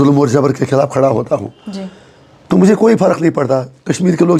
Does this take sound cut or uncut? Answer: uncut